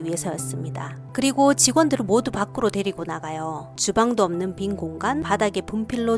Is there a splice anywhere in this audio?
yes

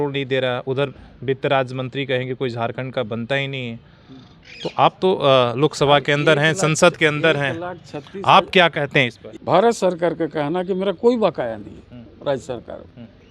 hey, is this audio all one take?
no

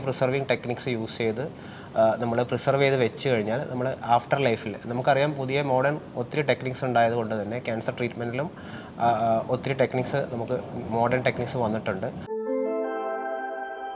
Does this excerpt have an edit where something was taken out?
yes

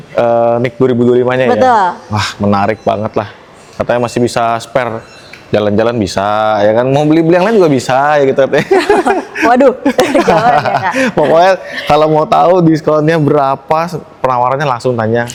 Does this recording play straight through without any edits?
yes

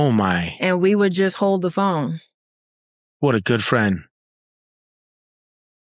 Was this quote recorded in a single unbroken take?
yes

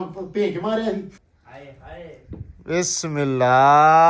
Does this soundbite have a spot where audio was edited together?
yes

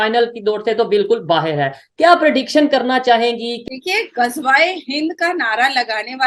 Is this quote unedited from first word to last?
no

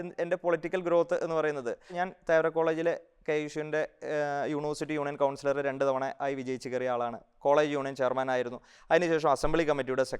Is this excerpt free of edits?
no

